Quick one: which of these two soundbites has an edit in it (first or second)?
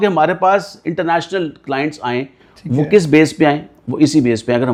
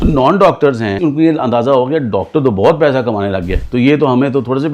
second